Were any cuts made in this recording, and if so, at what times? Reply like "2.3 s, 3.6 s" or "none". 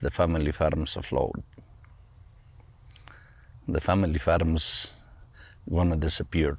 none